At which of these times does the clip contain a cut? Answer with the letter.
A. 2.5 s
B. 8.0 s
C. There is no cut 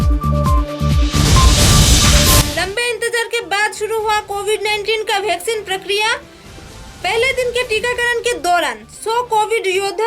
A